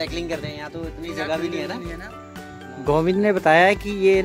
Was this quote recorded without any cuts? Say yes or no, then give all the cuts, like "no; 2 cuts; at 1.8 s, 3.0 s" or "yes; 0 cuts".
no; 1 cut; at 2.1 s